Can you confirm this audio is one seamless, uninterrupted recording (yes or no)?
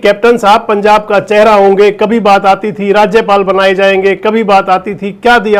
yes